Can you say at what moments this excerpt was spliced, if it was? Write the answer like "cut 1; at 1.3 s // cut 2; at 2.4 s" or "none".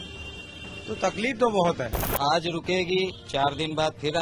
cut 1; at 2.0 s